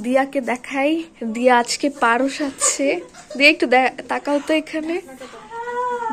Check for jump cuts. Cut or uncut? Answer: uncut